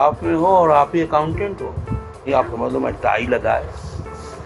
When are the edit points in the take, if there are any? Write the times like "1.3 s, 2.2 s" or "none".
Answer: 2.4 s

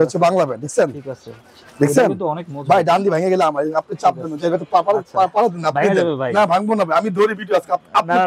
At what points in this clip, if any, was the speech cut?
none

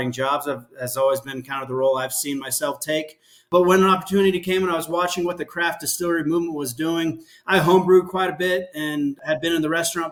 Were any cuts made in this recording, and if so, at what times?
none

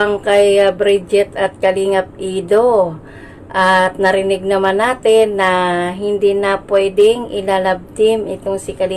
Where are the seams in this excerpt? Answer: none

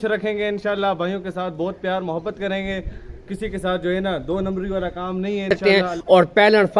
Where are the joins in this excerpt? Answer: 5.6 s

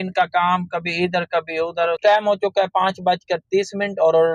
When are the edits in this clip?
2.0 s

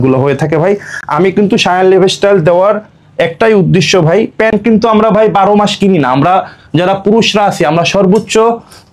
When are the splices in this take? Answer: none

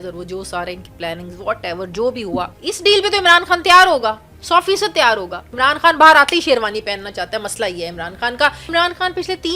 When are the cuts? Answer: 2.5 s, 5.5 s, 8.6 s

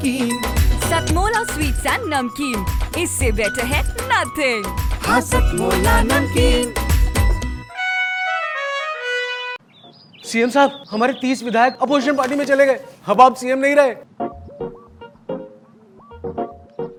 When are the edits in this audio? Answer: none

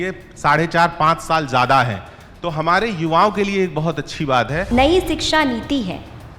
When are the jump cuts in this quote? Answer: 4.7 s

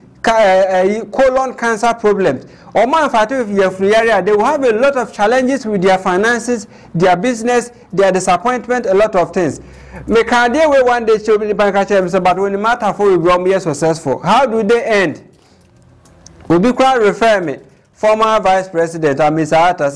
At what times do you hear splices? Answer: none

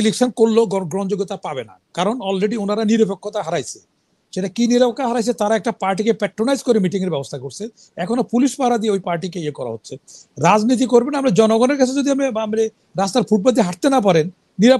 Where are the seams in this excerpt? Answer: none

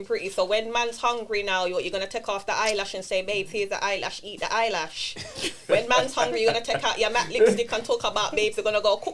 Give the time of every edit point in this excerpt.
none

